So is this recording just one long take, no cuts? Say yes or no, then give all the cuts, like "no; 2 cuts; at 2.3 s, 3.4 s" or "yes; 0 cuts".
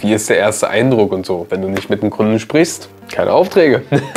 no; 1 cut; at 1.5 s